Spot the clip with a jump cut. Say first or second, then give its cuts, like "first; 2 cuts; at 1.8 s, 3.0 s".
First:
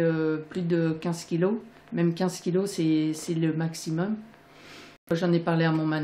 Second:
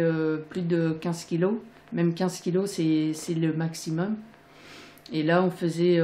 first; 1 cut; at 5.1 s